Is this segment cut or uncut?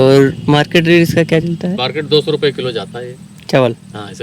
uncut